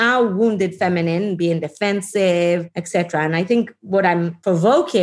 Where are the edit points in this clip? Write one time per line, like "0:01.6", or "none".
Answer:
0:02.8
0:04.1